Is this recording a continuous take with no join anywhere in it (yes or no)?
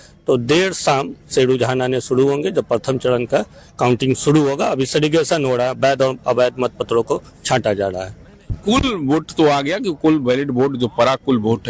yes